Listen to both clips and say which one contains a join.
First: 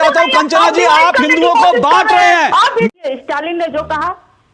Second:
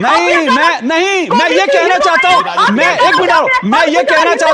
first; 1 cut; at 2.9 s

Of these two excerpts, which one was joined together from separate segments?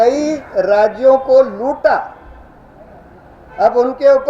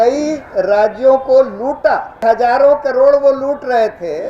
second; 1 cut; at 2.2 s

